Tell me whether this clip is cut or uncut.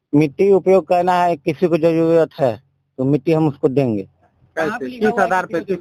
uncut